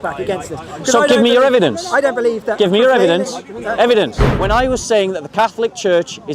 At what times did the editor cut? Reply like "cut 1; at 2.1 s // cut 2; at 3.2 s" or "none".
cut 1; at 4.3 s